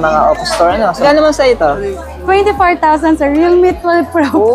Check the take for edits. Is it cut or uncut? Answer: cut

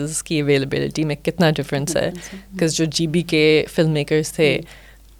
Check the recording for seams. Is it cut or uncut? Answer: uncut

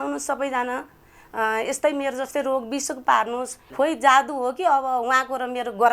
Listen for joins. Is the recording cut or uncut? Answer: cut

